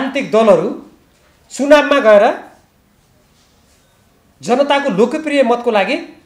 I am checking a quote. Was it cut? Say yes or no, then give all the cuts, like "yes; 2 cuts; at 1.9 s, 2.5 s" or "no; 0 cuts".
no; 0 cuts